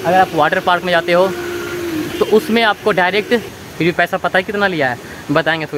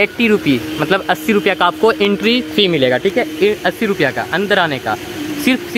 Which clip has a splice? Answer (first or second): first